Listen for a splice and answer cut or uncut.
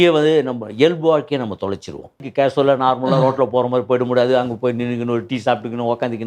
cut